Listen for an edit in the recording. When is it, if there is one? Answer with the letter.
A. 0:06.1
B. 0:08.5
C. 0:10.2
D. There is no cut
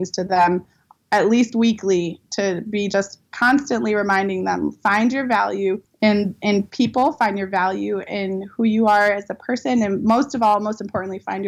A